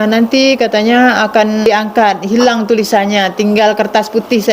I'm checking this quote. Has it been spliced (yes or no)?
yes